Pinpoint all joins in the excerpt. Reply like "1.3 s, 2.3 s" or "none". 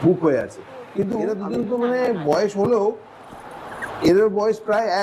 1.2 s